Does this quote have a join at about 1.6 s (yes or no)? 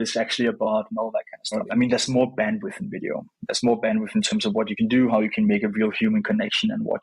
yes